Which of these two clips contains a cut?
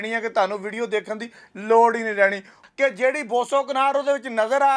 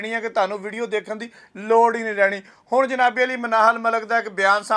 first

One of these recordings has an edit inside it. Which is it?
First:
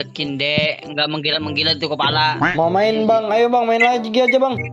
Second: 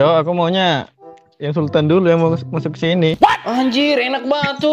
first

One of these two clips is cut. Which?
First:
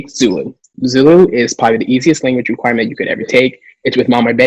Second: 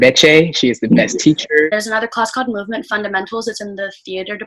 second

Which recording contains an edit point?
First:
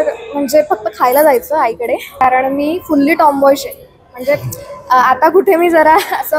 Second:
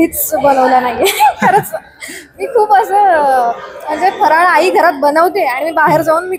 first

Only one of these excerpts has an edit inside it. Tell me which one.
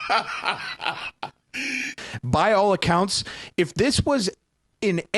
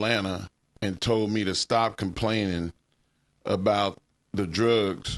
first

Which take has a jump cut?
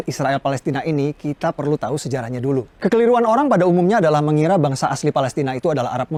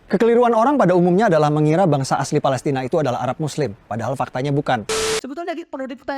second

